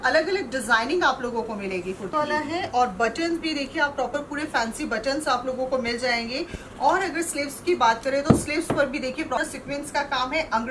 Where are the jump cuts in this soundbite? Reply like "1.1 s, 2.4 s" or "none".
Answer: 2.1 s, 9.4 s